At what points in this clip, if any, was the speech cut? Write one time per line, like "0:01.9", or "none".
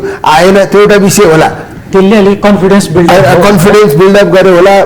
none